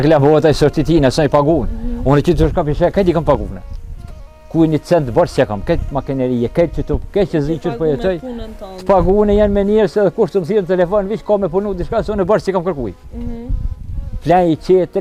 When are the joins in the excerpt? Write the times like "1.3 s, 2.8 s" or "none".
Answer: none